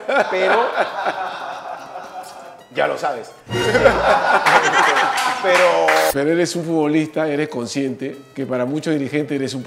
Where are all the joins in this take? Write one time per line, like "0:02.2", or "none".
0:06.1
0:08.2

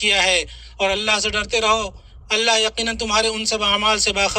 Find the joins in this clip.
none

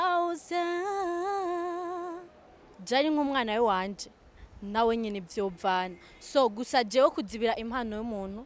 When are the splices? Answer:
0:02.8

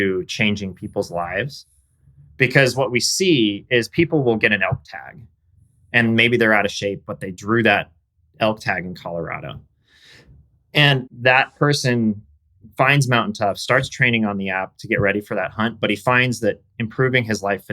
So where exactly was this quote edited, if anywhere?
0:11.0

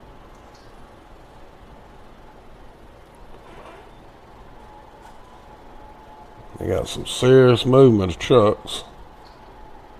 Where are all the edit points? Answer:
none

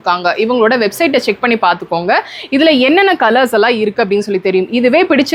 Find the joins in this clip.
none

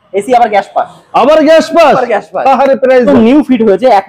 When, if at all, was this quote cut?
0:03.1

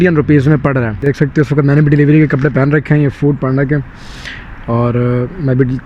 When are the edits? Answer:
0:01.0

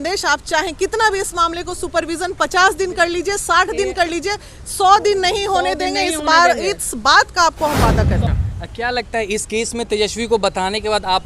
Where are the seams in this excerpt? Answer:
0:08.2

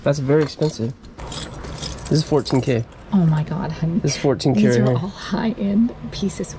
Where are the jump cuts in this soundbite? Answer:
0:01.1

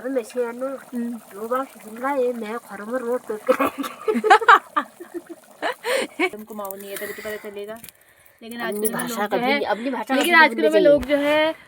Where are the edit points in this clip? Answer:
0:06.3

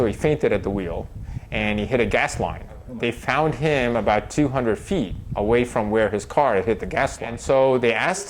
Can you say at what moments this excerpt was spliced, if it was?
0:02.9
0:07.3

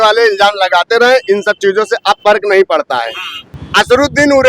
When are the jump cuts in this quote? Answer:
0:03.6

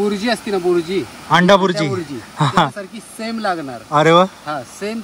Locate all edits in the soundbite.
none

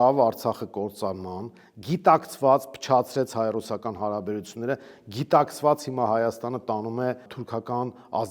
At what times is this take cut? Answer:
0:07.4

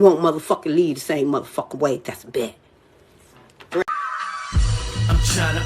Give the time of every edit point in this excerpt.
0:03.9

